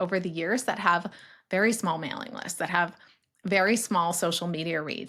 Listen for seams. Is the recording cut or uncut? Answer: uncut